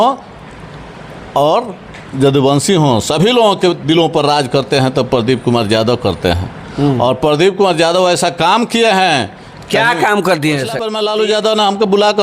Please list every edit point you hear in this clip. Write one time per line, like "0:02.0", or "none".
0:10.9